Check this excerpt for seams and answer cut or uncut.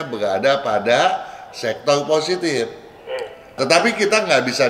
uncut